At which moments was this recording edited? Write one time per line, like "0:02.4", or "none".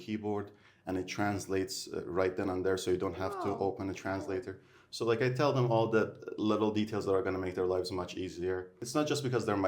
0:08.7